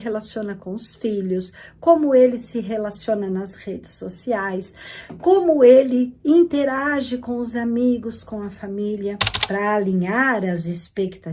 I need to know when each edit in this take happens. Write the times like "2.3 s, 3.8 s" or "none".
9.3 s